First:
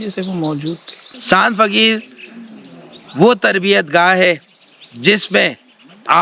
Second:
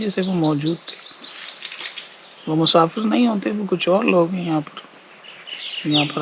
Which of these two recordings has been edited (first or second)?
first